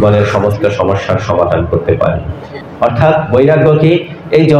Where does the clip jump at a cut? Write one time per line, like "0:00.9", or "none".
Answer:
0:02.6